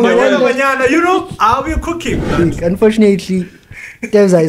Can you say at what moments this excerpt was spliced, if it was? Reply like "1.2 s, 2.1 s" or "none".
2.3 s